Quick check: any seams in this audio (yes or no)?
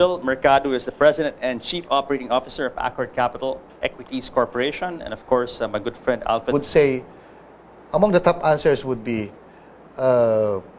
no